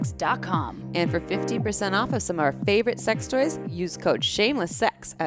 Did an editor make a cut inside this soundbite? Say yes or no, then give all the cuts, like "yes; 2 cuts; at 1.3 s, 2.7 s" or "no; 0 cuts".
no; 0 cuts